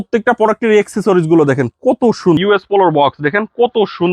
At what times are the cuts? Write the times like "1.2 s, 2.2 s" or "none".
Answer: 2.4 s